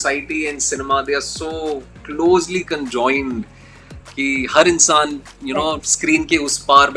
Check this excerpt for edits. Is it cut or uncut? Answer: uncut